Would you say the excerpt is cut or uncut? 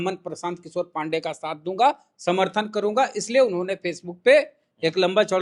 uncut